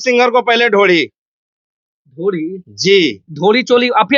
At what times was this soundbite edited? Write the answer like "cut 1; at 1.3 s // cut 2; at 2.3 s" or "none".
none